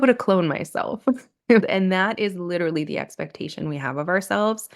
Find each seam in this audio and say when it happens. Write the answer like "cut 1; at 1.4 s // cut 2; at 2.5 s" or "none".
none